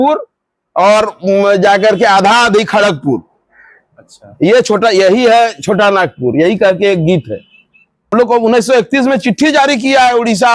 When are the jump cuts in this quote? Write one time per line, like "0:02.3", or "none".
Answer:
0:08.1